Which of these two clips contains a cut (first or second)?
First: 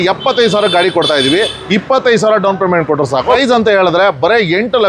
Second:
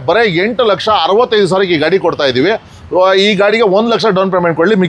first